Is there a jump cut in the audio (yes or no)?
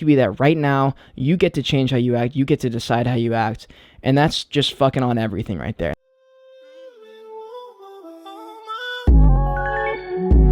yes